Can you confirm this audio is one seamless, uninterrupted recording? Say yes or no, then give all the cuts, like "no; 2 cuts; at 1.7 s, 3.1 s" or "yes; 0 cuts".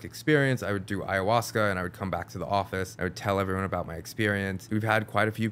no; 2 cuts; at 2.9 s, 4.6 s